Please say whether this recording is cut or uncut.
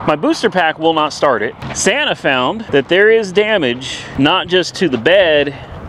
cut